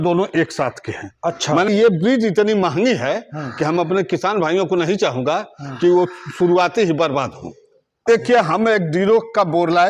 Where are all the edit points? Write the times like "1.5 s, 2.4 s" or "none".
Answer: 1.7 s, 8.1 s